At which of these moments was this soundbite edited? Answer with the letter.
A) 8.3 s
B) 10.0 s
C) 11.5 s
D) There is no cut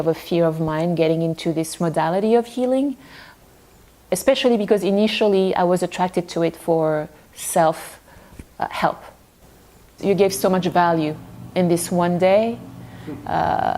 B